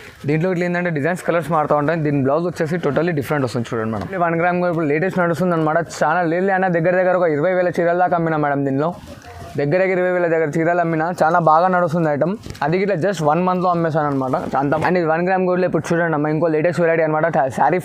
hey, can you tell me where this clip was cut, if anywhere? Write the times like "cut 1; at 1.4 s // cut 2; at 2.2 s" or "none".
cut 1; at 4.2 s // cut 2; at 14.8 s